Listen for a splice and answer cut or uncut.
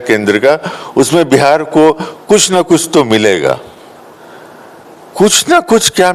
uncut